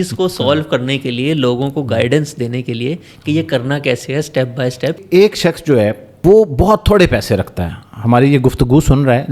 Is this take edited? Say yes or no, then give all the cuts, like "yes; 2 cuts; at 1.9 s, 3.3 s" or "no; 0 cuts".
yes; 2 cuts; at 5.0 s, 6.1 s